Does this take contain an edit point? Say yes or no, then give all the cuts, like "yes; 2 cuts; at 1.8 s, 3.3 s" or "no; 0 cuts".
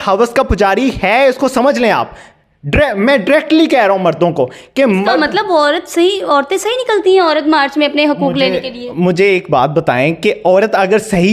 no; 0 cuts